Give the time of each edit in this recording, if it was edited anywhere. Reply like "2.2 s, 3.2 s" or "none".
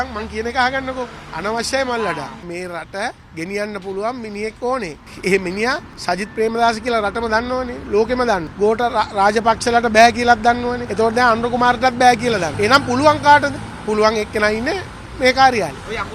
1.2 s, 2.4 s, 3.2 s, 5.0 s, 5.9 s, 8.5 s, 10.8 s, 12.5 s, 13.7 s